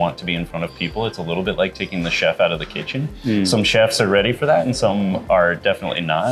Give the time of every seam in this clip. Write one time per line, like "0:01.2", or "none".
none